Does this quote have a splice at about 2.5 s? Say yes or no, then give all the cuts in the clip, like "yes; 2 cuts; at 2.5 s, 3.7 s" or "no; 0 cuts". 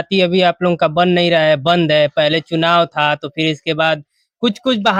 no; 0 cuts